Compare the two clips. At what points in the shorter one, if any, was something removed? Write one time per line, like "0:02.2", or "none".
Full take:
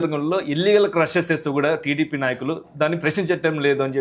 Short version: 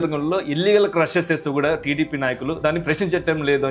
0:02.6